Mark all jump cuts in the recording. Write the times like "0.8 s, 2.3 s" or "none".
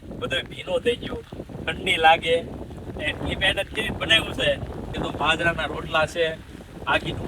4.9 s